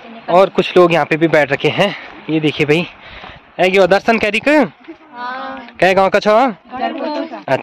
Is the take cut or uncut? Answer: uncut